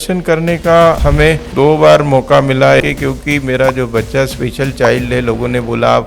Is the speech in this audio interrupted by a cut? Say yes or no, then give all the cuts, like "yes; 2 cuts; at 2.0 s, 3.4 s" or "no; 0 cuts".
yes; 2 cuts; at 1.0 s, 2.8 s